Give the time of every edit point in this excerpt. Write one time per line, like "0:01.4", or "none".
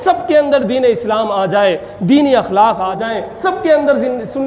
0:02.9